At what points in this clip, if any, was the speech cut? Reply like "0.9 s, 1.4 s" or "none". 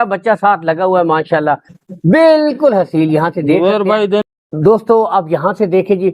4.3 s